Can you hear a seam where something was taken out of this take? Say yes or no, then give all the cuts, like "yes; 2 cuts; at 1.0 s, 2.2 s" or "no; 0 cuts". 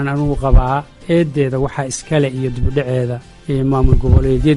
yes; 2 cuts; at 1.0 s, 3.3 s